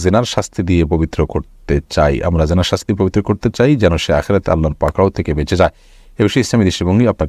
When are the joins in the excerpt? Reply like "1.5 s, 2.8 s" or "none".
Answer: none